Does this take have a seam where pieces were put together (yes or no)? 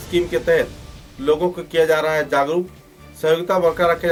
no